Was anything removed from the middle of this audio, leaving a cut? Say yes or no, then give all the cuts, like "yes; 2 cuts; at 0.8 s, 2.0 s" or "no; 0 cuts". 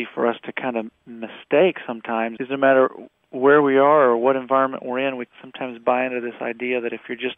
no; 0 cuts